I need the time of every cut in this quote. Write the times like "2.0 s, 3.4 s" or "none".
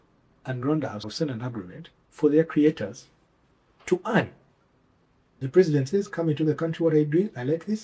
1.0 s